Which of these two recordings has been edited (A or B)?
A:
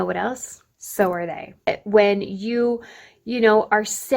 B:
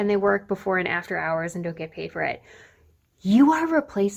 A